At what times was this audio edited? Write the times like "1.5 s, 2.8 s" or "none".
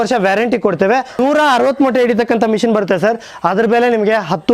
1.2 s